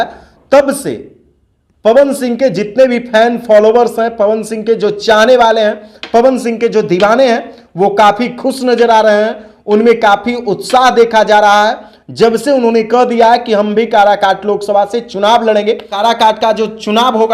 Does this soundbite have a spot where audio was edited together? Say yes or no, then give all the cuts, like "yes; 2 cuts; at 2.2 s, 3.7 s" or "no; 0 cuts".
yes; 1 cut; at 15.9 s